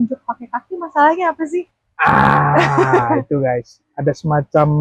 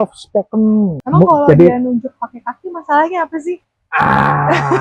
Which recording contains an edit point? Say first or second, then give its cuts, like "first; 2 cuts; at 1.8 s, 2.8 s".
second; 1 cut; at 1.0 s